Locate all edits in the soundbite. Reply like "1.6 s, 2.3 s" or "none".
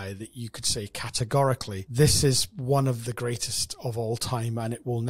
1.8 s